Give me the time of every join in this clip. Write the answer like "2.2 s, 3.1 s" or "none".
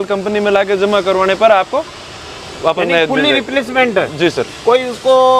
none